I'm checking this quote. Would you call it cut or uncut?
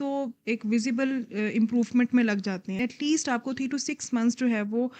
cut